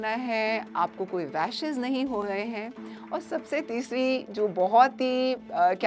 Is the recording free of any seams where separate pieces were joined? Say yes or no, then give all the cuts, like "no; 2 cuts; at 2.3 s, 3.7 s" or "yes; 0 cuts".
yes; 0 cuts